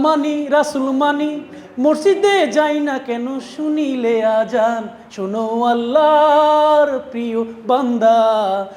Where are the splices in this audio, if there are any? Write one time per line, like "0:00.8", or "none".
none